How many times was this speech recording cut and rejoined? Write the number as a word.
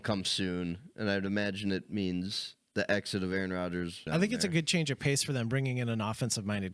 one